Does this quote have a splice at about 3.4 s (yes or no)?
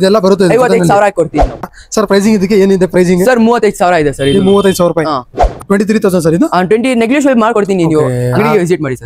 no